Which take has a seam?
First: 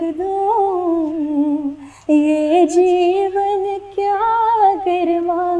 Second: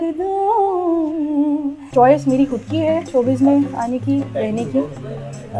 second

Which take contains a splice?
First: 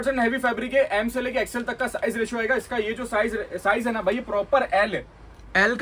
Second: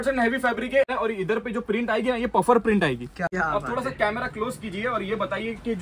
second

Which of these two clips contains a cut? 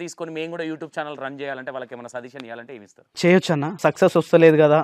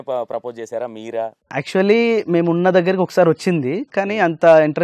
first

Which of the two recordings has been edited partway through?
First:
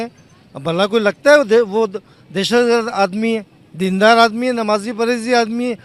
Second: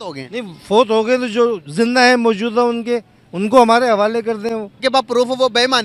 second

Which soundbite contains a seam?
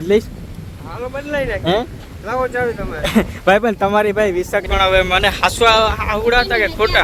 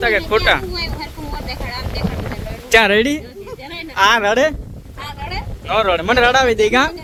first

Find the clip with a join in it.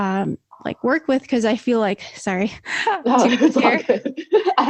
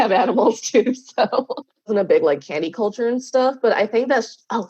second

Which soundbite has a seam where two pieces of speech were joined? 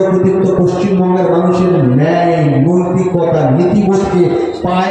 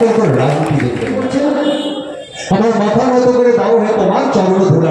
second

